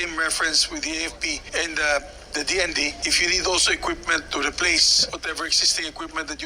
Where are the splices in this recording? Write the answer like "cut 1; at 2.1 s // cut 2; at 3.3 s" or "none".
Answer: cut 1; at 1.4 s // cut 2; at 3.0 s // cut 3; at 5.0 s